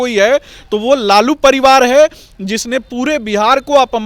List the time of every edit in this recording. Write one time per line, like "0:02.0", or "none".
none